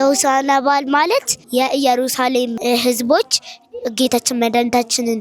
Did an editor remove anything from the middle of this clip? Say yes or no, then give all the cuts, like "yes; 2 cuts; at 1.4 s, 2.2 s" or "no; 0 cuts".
yes; 2 cuts; at 1.4 s, 2.6 s